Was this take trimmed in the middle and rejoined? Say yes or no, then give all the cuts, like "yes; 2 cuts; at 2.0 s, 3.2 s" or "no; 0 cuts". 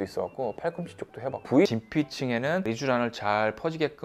yes; 1 cut; at 1.7 s